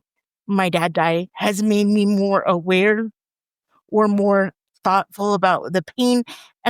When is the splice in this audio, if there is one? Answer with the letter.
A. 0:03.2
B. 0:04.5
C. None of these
B